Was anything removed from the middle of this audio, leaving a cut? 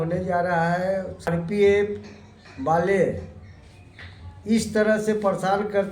yes; 1 cut; at 1.3 s

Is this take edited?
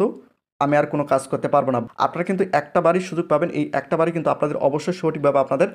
yes; 1 cut; at 1.8 s

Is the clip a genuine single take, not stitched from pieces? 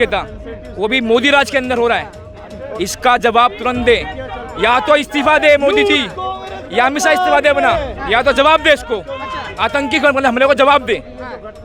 yes; 0 cuts

